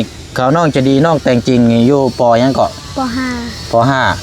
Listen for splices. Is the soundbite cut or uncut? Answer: uncut